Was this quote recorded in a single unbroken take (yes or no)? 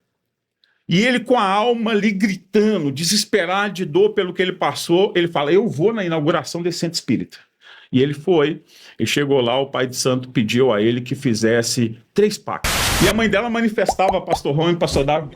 no